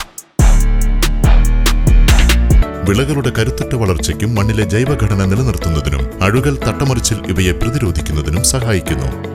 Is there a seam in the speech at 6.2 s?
no; 1 cut; at 2.6 s

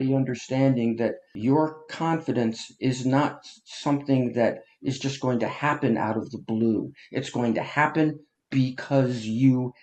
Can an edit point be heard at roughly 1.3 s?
yes; 1 cut; at 1.3 s

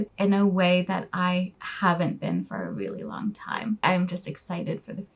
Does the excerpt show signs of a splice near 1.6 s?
no; 1 cut; at 3.8 s

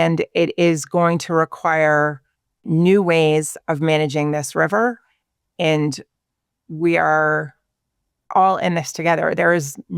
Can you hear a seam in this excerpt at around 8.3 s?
yes; 2 cuts; at 2.6 s, 8.3 s

